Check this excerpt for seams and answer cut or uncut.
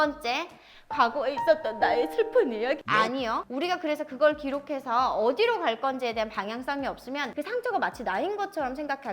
cut